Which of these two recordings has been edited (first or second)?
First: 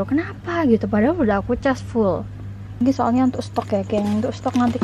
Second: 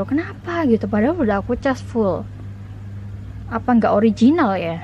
first